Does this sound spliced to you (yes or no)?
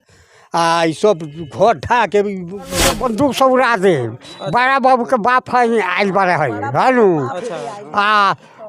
yes